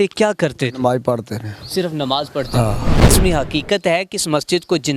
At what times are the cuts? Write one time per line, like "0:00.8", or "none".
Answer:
0:02.9